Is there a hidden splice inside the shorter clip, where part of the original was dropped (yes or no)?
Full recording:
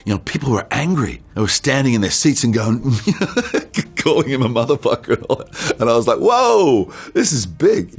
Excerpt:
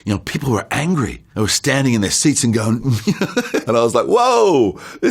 yes